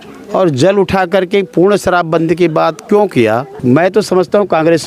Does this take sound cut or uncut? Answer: cut